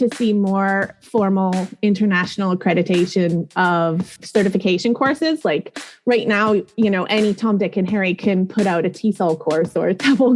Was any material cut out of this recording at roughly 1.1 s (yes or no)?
no